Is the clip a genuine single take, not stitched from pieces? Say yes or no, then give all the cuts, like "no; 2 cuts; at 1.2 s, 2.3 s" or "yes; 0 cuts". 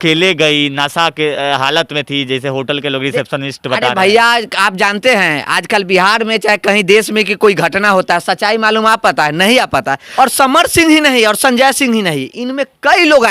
no; 1 cut; at 10.0 s